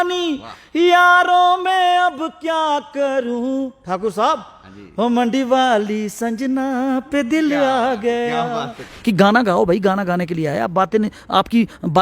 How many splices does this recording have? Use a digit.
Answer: 1